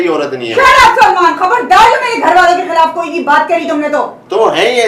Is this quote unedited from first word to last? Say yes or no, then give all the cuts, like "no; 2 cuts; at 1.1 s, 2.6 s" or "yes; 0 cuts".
yes; 0 cuts